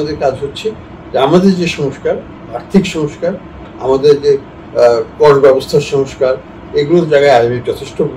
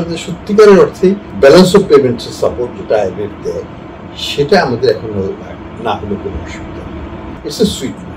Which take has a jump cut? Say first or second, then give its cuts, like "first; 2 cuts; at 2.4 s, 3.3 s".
second; 2 cuts; at 1.3 s, 7.4 s